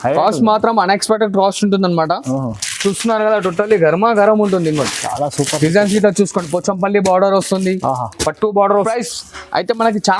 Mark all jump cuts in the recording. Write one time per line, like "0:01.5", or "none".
0:08.9